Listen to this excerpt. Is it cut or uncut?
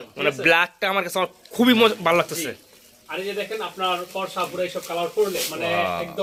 uncut